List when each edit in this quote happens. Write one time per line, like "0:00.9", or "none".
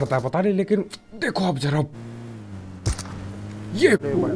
0:02.6